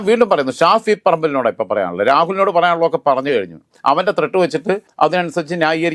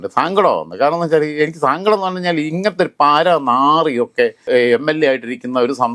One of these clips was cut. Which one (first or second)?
first